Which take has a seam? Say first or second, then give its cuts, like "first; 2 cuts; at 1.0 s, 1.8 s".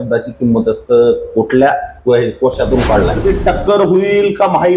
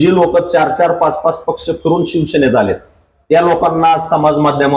first; 1 cut; at 3.2 s